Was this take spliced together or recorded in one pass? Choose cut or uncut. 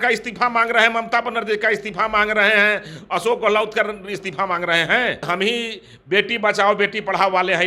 cut